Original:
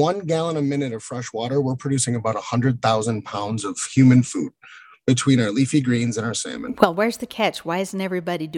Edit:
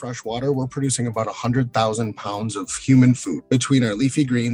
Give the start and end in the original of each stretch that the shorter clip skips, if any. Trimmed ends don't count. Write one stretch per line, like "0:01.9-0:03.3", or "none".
0:04.4-0:04.9